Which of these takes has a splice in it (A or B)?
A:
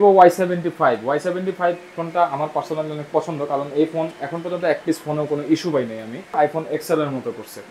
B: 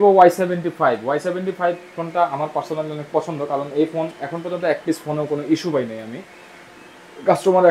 A